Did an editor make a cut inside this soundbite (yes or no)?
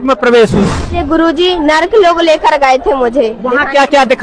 yes